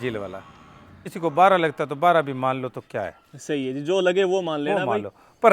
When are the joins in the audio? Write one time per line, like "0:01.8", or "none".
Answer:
0:01.1